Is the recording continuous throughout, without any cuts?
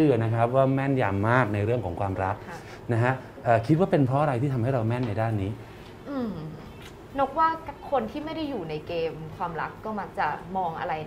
yes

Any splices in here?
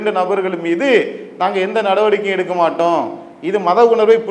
no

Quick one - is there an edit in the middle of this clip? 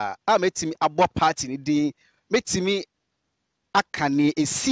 no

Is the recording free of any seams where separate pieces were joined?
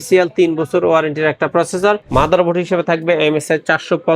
no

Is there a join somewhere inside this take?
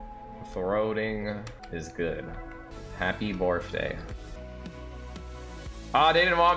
yes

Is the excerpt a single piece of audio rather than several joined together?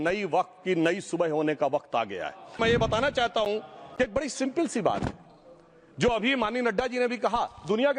no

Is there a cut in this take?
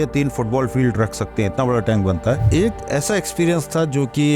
yes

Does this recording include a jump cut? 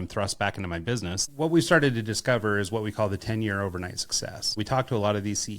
yes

